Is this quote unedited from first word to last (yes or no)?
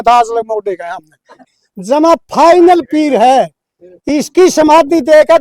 no